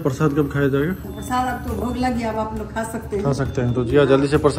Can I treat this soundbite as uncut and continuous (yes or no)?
yes